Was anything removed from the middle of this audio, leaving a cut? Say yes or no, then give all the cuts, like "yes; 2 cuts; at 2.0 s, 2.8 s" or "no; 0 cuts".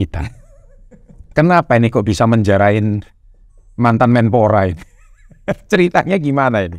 no; 0 cuts